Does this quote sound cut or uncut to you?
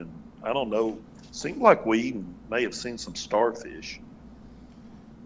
uncut